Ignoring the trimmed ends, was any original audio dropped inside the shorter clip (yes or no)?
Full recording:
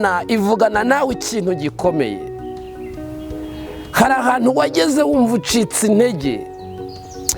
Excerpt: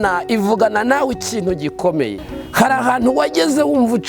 yes